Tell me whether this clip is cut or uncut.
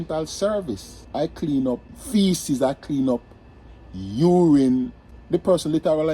cut